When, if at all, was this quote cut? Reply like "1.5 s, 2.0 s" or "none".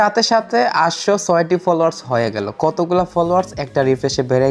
none